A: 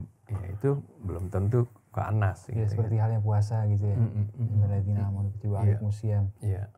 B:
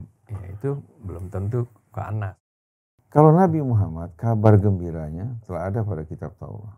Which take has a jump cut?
B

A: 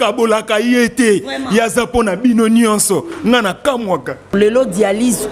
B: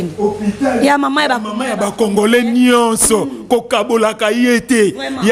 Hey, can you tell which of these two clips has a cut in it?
A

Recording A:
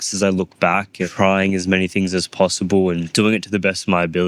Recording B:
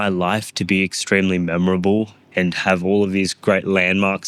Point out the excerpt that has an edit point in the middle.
A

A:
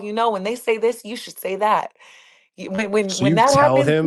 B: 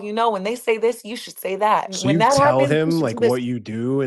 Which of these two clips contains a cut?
B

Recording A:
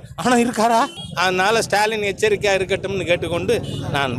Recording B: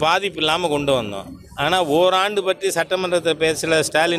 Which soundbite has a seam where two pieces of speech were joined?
A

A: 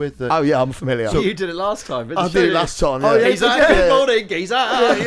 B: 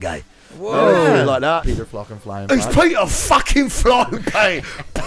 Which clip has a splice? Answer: B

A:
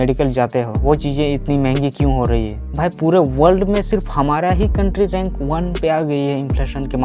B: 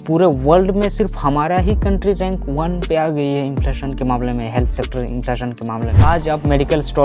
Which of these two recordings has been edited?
B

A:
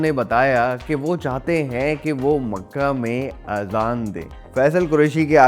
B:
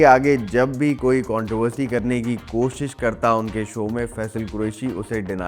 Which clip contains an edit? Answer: A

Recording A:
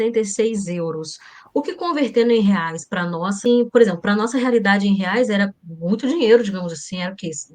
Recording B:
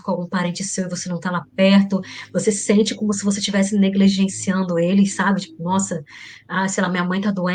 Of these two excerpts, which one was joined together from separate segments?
A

